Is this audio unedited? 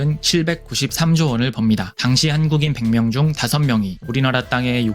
no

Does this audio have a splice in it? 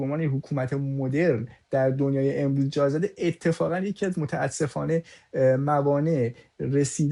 no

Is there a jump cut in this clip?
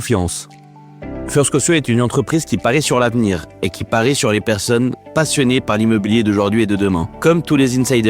yes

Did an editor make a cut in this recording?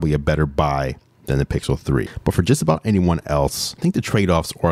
yes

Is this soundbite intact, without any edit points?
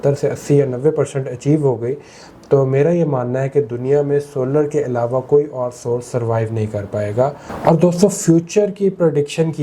no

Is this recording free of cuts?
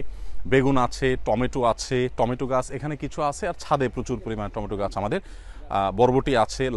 yes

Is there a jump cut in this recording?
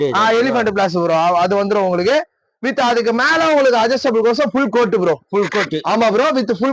no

